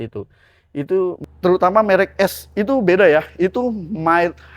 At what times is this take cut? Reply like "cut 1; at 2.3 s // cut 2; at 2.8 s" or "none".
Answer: cut 1; at 1.2 s